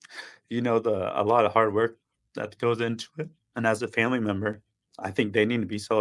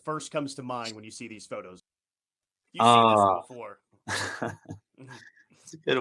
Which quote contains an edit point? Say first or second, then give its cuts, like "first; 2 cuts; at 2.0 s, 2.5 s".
second; 1 cut; at 1.7 s